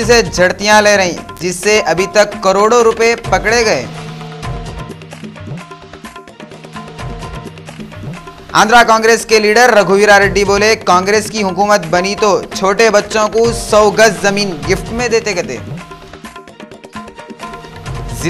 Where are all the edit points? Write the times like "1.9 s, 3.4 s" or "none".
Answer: none